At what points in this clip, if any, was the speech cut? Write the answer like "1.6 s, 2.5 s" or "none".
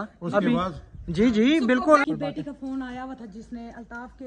2.0 s